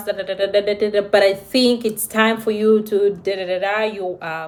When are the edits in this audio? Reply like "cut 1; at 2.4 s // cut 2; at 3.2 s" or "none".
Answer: none